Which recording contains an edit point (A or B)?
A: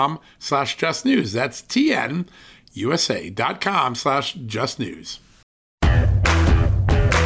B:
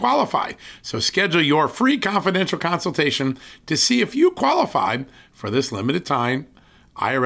A